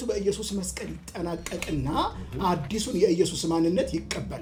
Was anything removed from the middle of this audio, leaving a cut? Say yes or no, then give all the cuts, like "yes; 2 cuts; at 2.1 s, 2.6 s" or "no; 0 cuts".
no; 0 cuts